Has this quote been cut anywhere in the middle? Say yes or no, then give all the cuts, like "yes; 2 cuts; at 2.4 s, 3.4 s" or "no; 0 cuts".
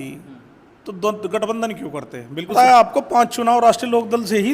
yes; 1 cut; at 2.5 s